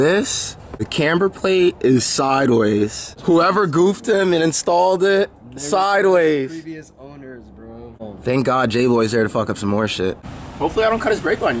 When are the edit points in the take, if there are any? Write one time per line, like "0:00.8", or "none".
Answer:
0:00.9
0:03.1
0:08.0
0:10.4